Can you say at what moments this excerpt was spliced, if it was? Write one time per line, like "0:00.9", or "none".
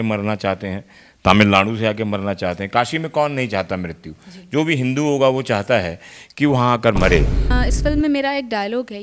0:07.5